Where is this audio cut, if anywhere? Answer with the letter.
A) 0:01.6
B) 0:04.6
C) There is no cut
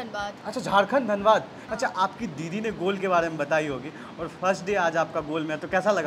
A